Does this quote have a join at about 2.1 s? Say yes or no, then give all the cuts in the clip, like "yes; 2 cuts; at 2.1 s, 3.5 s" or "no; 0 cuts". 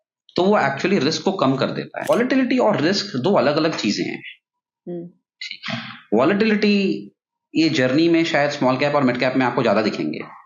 yes; 1 cut; at 2.1 s